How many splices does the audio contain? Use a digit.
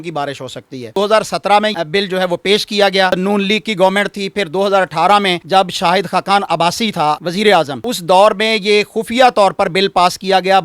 4